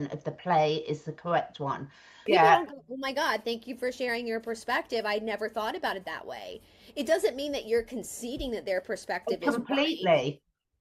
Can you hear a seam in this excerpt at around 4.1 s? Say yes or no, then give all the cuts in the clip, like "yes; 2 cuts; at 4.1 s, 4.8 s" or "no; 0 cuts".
no; 1 cut; at 2.2 s